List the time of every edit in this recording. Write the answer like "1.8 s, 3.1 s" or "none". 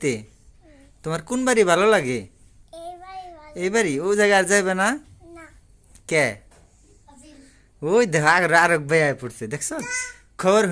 none